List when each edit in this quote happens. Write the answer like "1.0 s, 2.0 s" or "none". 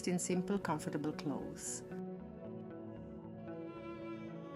none